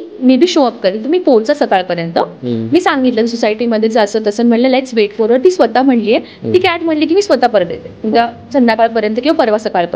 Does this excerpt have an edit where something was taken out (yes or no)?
no